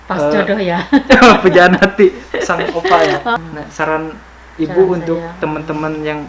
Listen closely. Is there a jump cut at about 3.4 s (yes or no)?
yes